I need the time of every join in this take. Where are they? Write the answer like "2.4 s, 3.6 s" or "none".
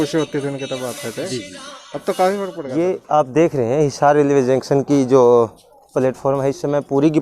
2.6 s